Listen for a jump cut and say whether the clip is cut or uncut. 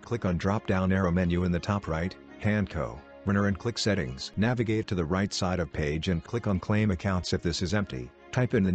cut